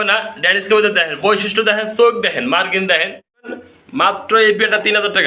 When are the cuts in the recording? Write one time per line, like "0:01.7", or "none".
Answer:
0:03.6